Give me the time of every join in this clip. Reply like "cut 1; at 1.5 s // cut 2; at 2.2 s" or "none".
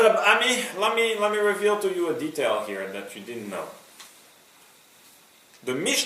cut 1; at 2.1 s